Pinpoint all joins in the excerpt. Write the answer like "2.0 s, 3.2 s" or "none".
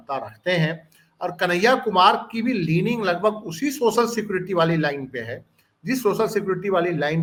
none